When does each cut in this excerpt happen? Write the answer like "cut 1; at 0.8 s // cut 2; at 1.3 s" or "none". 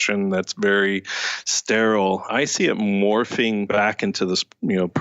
cut 1; at 2.3 s // cut 2; at 3.7 s

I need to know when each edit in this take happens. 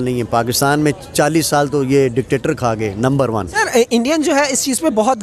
cut 1; at 3.6 s

